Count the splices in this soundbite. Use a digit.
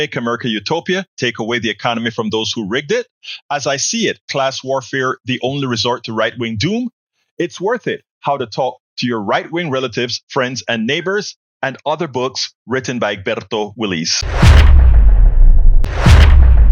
2